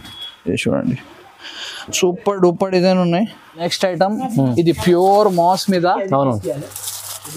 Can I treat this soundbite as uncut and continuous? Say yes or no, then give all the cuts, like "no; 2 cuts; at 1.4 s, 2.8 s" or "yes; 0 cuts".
no; 1 cut; at 3.5 s